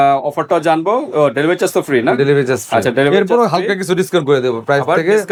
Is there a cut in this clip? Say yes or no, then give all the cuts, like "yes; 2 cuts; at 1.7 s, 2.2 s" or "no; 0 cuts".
no; 0 cuts